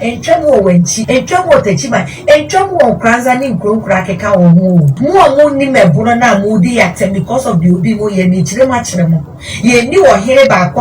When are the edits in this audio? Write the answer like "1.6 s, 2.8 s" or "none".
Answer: 1.0 s, 4.9 s